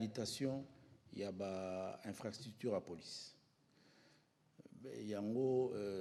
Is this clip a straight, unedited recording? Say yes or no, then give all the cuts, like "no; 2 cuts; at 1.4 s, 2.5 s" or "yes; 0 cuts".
yes; 0 cuts